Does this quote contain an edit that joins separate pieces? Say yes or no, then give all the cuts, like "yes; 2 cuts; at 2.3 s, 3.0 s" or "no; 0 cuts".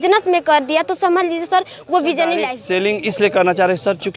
yes; 1 cut; at 2.6 s